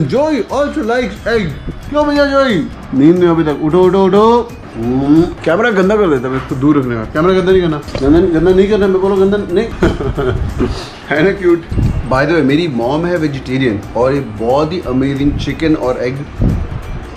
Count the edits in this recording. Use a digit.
0